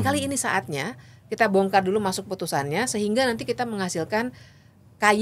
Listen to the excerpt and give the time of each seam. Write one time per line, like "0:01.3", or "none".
none